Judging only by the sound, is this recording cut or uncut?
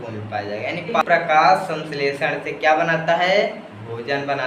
cut